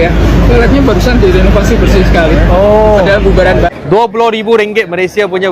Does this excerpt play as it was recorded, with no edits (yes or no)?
no